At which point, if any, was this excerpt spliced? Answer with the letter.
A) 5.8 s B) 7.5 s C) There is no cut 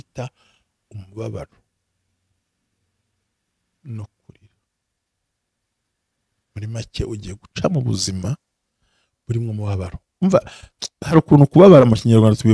C